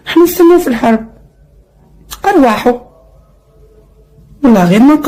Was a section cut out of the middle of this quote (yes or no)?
no